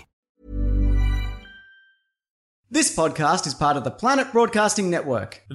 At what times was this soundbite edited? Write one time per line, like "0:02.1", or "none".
0:02.5